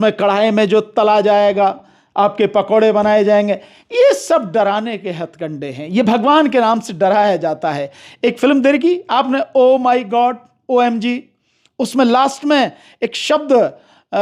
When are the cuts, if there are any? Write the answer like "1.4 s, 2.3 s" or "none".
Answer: none